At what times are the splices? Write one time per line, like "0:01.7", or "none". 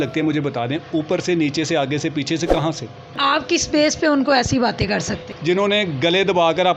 0:03.2
0:05.3